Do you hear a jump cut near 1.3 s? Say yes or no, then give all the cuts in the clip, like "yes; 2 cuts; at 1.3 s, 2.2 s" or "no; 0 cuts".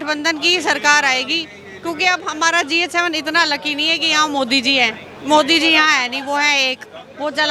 no; 0 cuts